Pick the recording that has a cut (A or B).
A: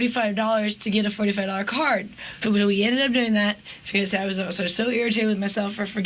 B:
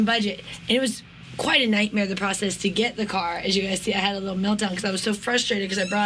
A